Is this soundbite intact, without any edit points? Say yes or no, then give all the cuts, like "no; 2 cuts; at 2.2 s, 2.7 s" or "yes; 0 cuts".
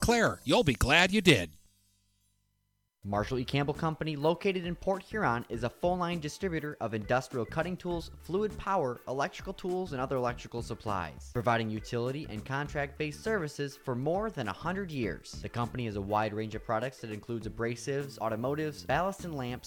no; 1 cut; at 2.9 s